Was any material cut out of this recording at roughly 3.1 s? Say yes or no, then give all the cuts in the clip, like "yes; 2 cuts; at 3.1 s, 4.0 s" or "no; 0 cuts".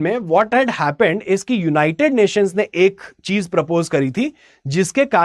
no; 0 cuts